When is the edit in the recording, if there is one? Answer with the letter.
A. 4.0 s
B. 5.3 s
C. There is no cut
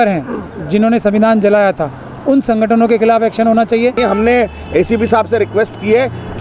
A